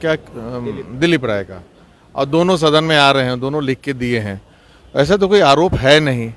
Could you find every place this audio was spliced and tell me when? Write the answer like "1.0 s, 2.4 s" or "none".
none